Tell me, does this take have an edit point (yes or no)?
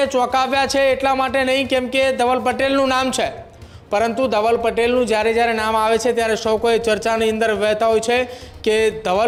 no